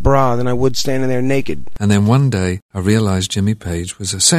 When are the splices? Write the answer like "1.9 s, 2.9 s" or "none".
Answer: 1.7 s, 2.7 s